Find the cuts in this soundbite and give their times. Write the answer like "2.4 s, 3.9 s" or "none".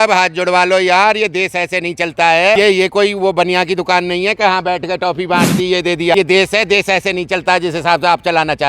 2.6 s, 6.1 s